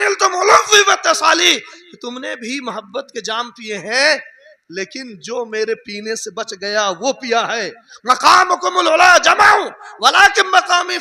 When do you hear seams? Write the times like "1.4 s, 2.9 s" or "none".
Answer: none